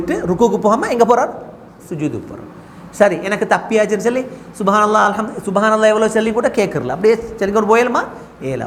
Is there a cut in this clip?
no; 0 cuts

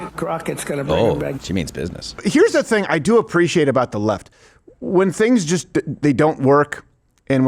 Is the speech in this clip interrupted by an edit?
yes; 1 cut; at 2.2 s

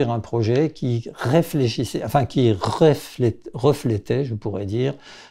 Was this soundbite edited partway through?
no; 0 cuts

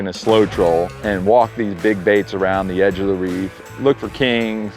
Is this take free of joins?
no; 1 cut; at 1.0 s

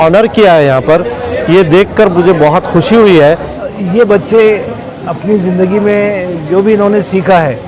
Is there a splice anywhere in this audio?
yes; 1 cut; at 3.7 s

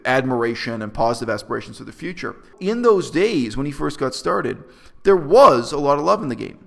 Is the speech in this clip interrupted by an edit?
yes; 1 cut; at 2.5 s

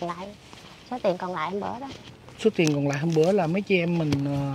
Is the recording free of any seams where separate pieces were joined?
yes; 0 cuts

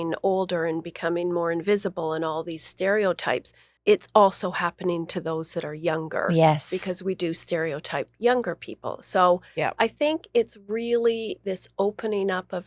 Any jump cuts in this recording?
yes; 1 cut; at 3.7 s

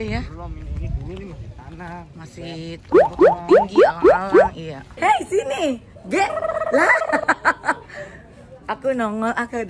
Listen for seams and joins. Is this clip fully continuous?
no; 1 cut; at 4.9 s

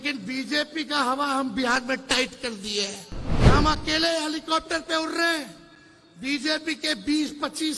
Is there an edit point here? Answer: yes; 1 cut; at 3.3 s

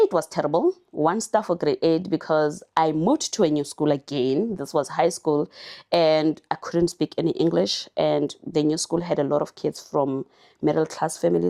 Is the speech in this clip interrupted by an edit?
no; 0 cuts

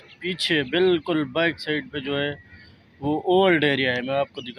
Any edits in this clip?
no; 0 cuts

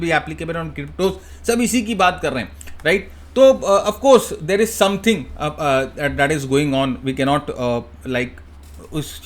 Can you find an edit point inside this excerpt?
no; 0 cuts

